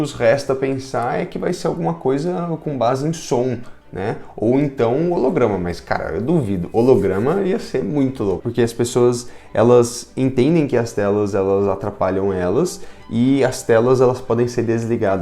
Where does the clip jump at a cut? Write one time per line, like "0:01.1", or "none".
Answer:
0:08.4